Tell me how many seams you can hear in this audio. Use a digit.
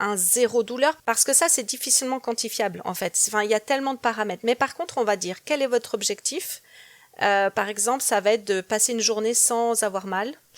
1